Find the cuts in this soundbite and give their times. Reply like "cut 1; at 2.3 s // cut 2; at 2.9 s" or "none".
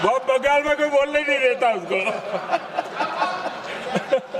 none